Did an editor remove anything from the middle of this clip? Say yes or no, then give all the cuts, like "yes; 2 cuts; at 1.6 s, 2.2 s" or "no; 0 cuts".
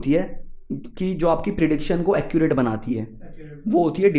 no; 0 cuts